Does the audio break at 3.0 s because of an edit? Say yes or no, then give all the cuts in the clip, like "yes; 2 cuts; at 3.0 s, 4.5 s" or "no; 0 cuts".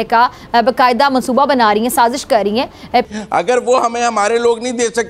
yes; 1 cut; at 3.0 s